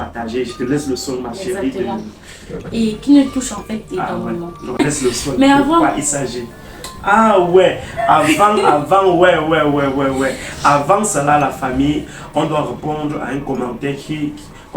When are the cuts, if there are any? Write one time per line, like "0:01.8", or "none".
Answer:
0:04.8